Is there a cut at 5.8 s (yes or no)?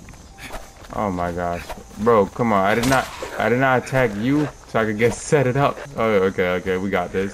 yes